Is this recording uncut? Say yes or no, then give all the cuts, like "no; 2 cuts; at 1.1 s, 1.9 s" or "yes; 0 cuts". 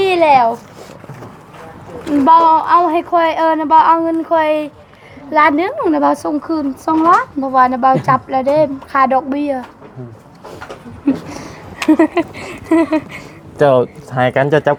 yes; 0 cuts